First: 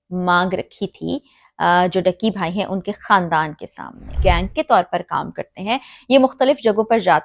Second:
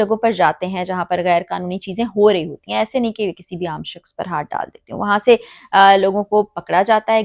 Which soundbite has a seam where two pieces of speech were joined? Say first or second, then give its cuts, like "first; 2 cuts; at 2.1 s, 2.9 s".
first; 1 cut; at 4.1 s